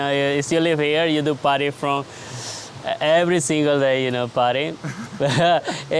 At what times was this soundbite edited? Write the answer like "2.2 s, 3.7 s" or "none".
none